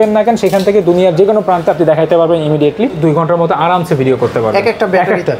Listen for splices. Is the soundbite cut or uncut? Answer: cut